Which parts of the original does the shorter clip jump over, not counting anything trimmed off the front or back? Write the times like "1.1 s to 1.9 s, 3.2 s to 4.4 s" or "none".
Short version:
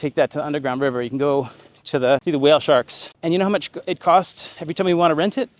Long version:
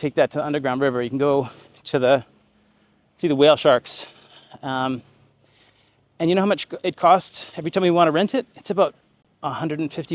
2.2 s to 3.2 s, 4.0 s to 6.0 s